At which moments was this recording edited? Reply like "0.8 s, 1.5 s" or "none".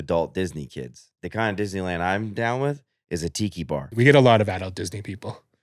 1.1 s, 3.9 s